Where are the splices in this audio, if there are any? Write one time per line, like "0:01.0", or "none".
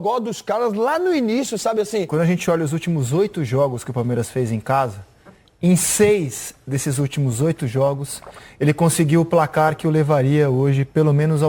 0:02.1